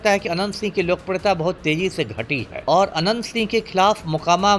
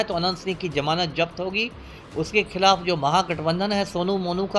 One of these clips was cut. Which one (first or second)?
first